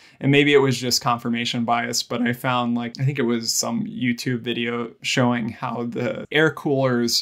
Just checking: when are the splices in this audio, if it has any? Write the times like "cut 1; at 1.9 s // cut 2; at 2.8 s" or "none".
cut 1; at 2.9 s // cut 2; at 5.0 s // cut 3; at 6.3 s